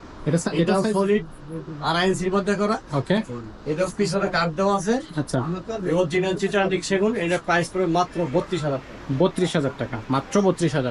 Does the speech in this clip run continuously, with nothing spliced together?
yes; 0 cuts

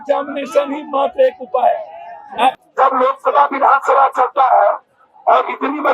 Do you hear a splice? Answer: yes; 1 cut; at 2.6 s

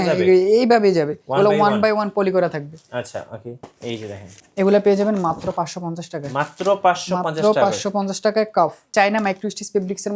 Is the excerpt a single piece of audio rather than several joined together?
no; 2 cuts; at 3.5 s, 8.9 s

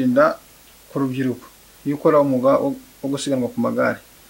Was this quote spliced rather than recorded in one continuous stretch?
no; 0 cuts

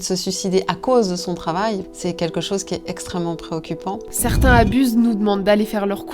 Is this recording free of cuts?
no; 2 cuts; at 1.9 s, 4.1 s

